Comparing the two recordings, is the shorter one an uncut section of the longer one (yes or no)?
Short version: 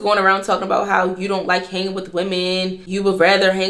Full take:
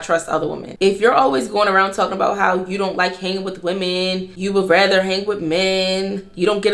yes